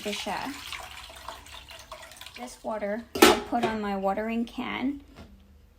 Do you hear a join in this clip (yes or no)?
yes